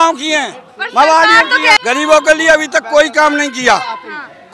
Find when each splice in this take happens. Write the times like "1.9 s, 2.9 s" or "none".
1.8 s